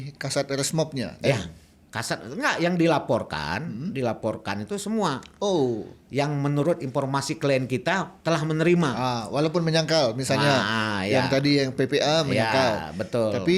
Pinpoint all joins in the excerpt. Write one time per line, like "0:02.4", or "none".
none